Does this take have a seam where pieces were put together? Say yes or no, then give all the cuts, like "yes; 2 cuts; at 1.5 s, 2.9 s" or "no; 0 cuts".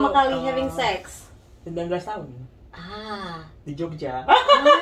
no; 0 cuts